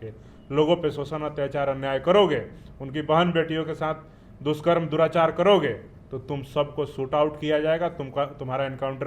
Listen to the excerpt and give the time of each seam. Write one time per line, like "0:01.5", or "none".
none